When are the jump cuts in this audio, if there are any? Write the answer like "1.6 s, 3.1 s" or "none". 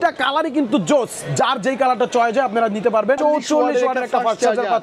3.2 s